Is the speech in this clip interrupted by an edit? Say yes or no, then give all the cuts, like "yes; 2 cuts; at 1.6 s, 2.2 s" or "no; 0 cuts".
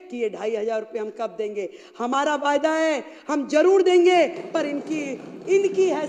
no; 0 cuts